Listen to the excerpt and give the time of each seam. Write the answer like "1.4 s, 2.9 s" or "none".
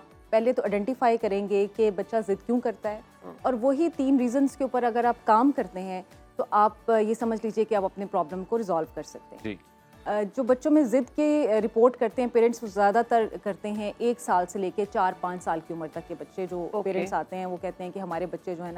none